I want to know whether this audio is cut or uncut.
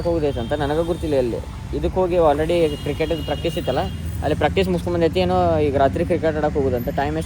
uncut